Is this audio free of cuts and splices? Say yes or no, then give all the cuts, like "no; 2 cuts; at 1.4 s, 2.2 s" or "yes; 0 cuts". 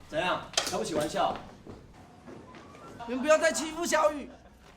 no; 1 cut; at 2.9 s